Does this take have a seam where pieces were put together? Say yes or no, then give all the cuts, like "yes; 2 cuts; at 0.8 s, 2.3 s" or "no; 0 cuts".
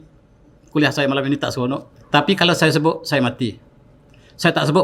yes; 1 cut; at 1.9 s